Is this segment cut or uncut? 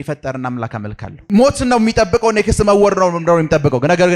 cut